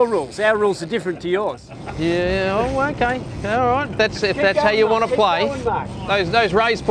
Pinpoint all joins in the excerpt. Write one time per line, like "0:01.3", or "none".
0:05.9